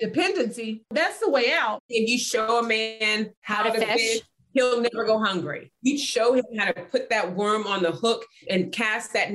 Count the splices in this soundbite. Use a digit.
3